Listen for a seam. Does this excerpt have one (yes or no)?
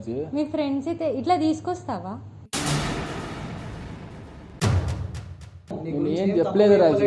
yes